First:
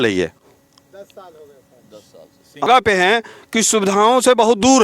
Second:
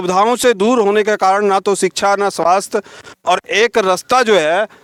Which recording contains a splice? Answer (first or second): first